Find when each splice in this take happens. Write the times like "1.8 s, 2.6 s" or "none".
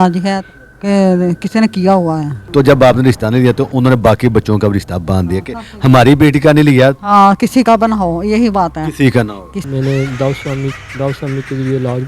2.4 s, 9.6 s